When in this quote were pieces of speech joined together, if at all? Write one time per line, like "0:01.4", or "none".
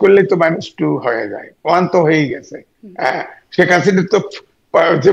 none